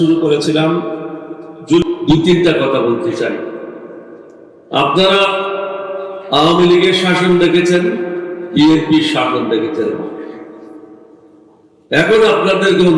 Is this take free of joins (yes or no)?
no